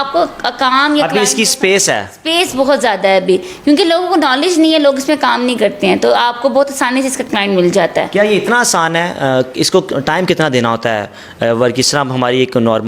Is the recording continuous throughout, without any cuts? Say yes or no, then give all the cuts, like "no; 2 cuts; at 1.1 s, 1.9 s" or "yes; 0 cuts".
yes; 0 cuts